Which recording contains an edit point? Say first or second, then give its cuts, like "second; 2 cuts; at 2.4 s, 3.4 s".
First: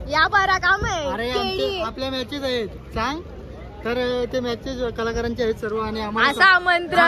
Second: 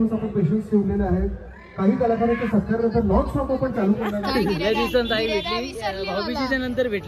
second; 1 cut; at 4.1 s